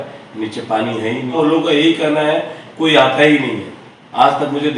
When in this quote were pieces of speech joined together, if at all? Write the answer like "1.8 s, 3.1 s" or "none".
1.4 s